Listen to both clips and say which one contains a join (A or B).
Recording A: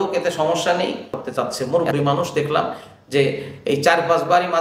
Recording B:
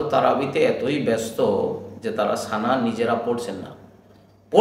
A